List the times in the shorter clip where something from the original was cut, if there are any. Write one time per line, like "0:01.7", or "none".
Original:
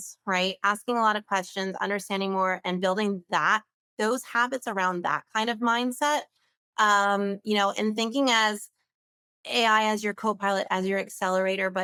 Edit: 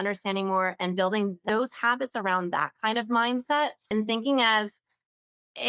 0:01.4
0:03.9